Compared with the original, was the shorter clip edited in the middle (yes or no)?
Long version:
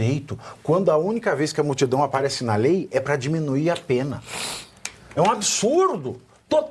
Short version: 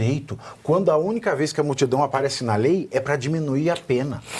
no